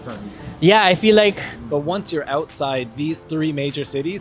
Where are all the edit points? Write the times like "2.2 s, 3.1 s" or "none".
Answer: 1.5 s